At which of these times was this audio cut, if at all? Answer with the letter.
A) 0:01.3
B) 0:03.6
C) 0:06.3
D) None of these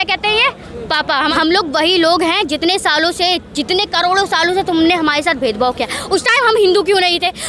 A